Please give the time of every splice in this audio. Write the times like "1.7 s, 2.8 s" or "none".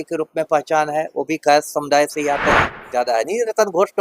2.8 s